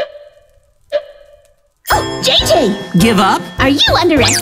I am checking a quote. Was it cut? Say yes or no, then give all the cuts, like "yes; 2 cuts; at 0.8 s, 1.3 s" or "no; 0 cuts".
yes; 1 cut; at 2.2 s